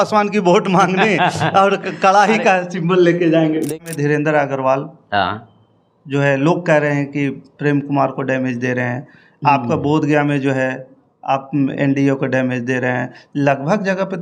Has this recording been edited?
yes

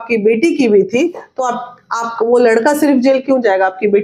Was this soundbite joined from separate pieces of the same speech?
no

